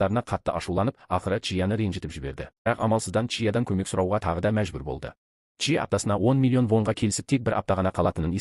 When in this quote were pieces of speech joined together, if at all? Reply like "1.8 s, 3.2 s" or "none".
none